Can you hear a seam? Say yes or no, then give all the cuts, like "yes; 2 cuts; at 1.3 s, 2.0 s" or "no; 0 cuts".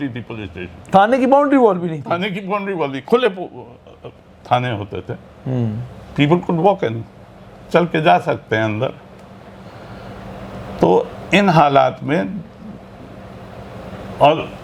no; 0 cuts